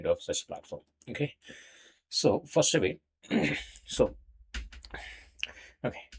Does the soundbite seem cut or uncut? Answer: uncut